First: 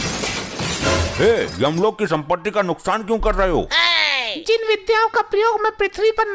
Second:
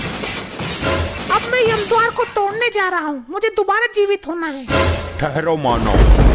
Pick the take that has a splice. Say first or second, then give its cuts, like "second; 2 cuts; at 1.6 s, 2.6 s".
second; 1 cut; at 1.1 s